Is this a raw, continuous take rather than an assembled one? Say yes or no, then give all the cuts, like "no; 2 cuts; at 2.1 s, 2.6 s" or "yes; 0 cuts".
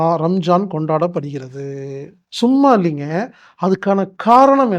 no; 1 cut; at 2.2 s